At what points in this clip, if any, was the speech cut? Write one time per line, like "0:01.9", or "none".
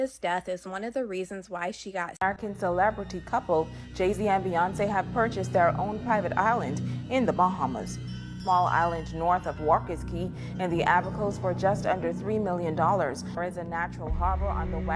0:02.1